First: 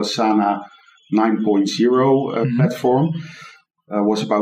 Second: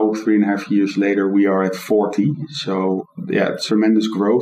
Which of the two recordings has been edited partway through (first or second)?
second